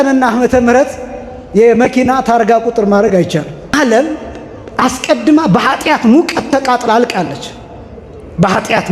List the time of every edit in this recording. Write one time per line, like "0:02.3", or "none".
0:03.7